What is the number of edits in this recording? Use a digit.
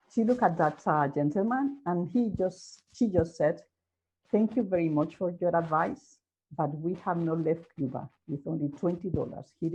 0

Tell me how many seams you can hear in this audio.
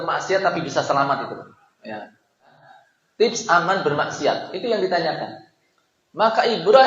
1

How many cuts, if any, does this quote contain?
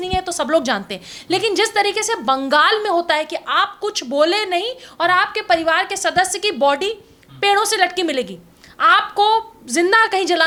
0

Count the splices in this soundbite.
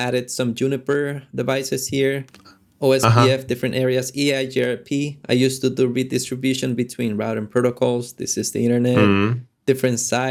0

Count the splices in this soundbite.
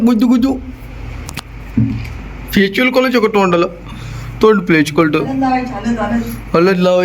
0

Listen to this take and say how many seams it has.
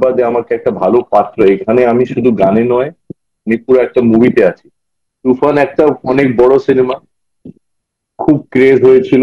1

